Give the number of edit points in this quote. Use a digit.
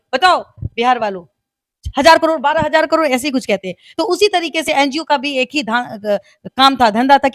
0